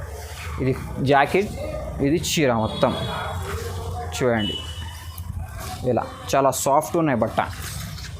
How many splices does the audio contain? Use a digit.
0